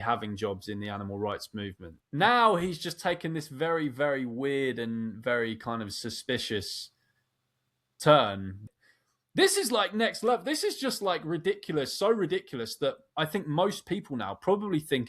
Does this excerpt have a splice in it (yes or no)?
yes